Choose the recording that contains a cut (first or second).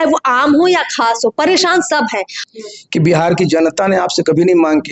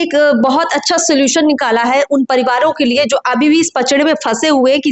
first